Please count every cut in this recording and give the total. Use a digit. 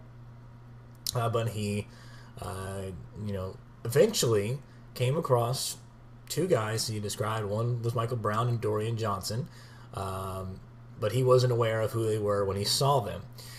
1